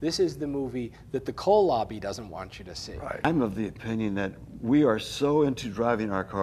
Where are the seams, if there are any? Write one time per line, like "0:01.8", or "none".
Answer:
0:03.2